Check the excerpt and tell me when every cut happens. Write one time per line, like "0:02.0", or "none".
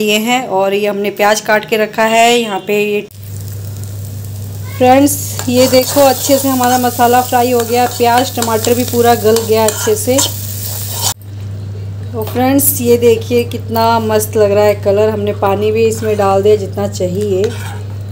0:03.1
0:11.1